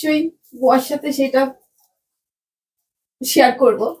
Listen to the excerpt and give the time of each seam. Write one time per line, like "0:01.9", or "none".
none